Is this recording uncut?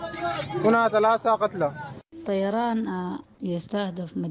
no; 2 cuts; at 2.1 s, 3.2 s

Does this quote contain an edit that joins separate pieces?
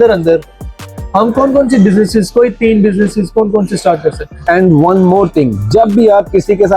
yes; 1 cut; at 4.3 s

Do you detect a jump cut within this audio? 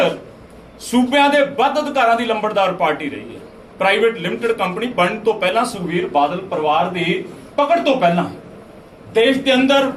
no; 0 cuts

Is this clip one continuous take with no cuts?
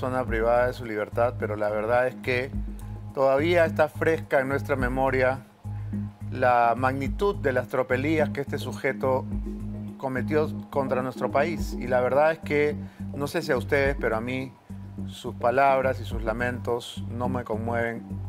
yes; 0 cuts

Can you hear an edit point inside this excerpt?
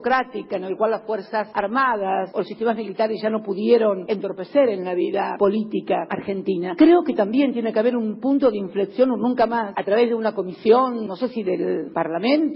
yes; 1 cut; at 11.4 s

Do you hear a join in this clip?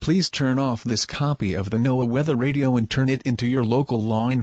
yes; 2 cuts; at 1.1 s, 2.6 s

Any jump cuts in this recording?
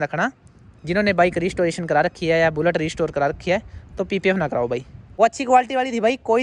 yes; 1 cut; at 5.0 s

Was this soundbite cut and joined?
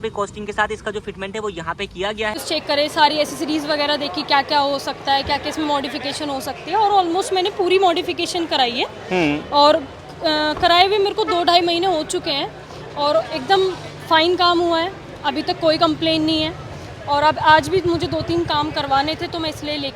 yes; 1 cut; at 2.4 s

